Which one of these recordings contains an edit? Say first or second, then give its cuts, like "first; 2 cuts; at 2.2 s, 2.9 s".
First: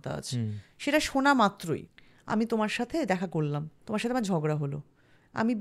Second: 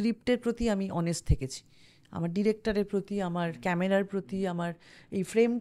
first; 2 cuts; at 1.9 s, 3.7 s